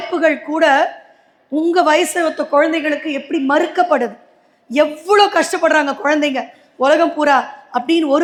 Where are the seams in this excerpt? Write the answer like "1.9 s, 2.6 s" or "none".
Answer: none